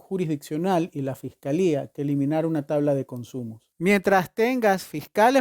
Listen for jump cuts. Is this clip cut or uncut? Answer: cut